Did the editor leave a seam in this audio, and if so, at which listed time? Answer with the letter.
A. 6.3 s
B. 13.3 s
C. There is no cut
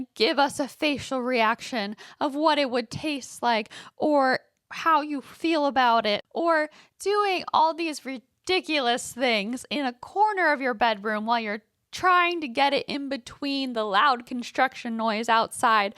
A